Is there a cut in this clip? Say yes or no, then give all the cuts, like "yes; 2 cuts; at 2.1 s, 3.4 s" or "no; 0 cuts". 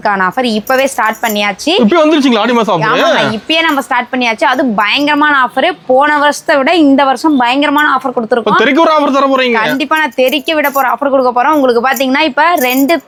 no; 0 cuts